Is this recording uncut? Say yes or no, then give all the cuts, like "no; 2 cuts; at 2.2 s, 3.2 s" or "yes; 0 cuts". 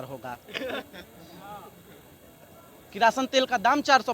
yes; 0 cuts